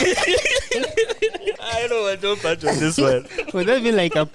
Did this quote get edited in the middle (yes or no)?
yes